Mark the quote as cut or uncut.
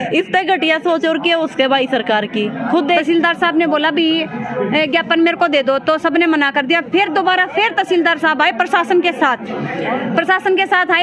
cut